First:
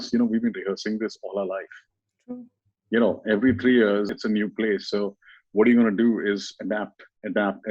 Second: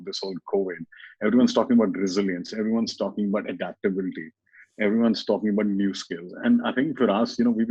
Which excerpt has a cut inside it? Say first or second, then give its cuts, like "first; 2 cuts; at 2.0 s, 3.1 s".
first; 1 cut; at 4.1 s